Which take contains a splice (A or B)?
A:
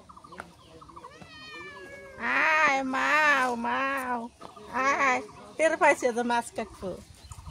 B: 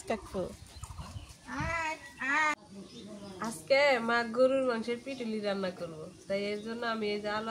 B